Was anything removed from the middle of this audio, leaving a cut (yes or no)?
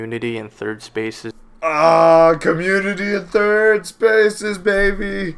yes